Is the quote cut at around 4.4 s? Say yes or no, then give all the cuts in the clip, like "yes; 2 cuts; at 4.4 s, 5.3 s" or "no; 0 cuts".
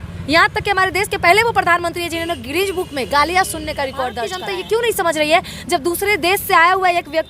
yes; 1 cut; at 4.4 s